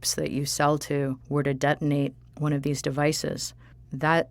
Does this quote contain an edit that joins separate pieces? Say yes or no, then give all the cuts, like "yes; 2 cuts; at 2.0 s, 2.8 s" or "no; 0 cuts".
yes; 3 cuts; at 1.2 s, 2.2 s, 3.5 s